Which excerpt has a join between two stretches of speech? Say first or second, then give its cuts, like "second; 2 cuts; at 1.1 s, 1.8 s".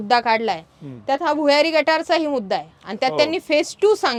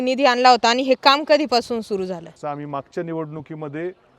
second; 1 cut; at 2.3 s